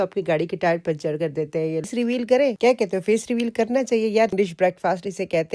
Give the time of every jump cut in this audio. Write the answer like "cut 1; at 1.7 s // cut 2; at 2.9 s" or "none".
cut 1; at 1.9 s // cut 2; at 4.3 s